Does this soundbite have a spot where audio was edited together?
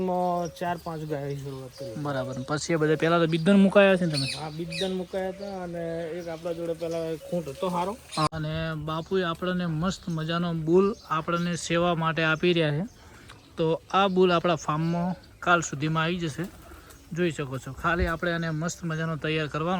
yes; 1 cut; at 8.3 s

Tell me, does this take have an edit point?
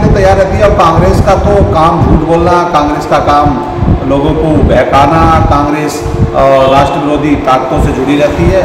no; 0 cuts

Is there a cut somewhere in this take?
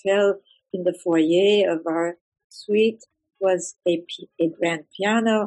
no; 0 cuts

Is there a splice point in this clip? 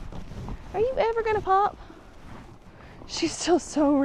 no; 0 cuts

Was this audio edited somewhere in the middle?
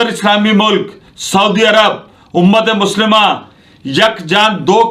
no; 0 cuts

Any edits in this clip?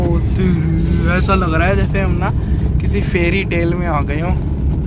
no; 0 cuts

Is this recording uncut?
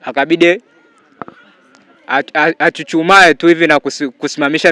yes; 0 cuts

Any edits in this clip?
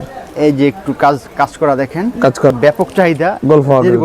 yes; 1 cut; at 2.5 s

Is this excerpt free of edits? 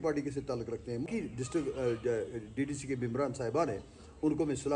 no; 1 cut; at 1.1 s

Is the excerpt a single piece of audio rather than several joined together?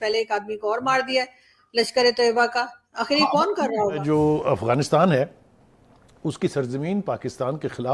no; 1 cut; at 4.0 s

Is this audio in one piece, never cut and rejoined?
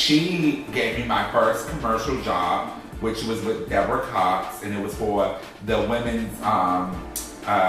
yes; 0 cuts

